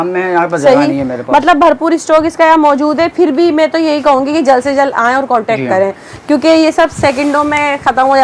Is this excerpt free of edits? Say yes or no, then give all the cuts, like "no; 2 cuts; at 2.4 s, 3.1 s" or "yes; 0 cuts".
yes; 0 cuts